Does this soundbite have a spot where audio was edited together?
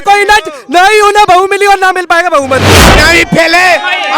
yes; 1 cut; at 2.8 s

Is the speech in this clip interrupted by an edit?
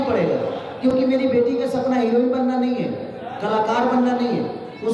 no; 0 cuts

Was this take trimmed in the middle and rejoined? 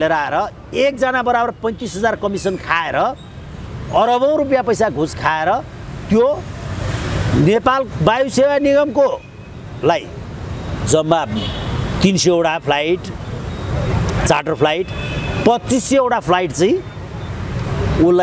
no; 0 cuts

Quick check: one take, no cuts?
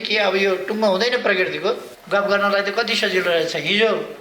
no; 1 cut; at 1.9 s

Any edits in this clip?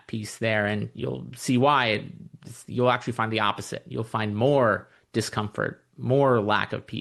no; 0 cuts

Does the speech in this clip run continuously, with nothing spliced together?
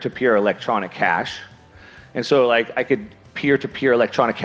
yes; 0 cuts

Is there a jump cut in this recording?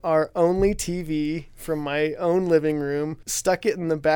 yes; 1 cut; at 3.2 s

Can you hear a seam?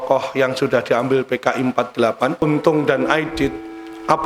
yes; 1 cut; at 2.4 s

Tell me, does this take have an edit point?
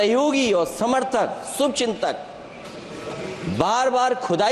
no; 0 cuts

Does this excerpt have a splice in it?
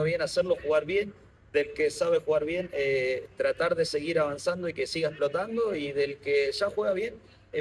no; 0 cuts

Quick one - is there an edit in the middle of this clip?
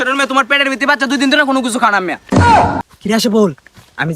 yes; 1 cut; at 2.8 s

